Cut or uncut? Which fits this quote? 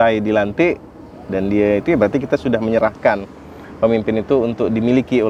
uncut